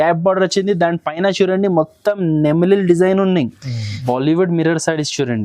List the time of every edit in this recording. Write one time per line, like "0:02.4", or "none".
0:03.9